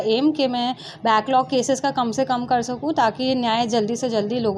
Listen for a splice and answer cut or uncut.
uncut